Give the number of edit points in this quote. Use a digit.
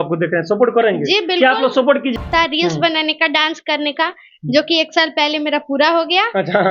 1